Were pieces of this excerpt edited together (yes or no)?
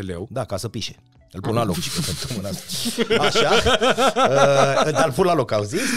no